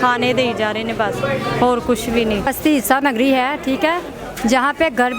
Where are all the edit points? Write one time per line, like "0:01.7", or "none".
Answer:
none